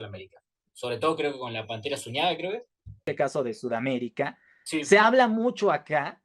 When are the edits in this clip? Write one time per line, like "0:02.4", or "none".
0:03.0